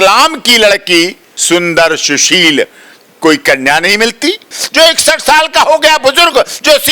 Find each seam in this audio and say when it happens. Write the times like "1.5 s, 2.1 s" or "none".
1.3 s, 4.6 s